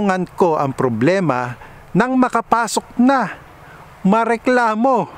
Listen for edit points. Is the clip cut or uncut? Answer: uncut